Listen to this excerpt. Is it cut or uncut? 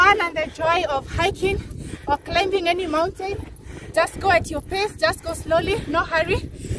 uncut